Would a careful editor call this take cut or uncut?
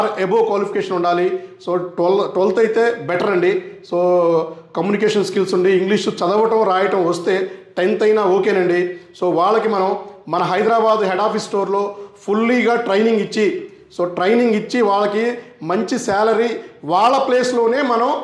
uncut